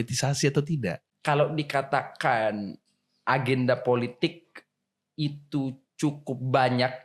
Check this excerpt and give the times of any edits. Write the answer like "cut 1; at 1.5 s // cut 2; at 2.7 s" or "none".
cut 1; at 1.0 s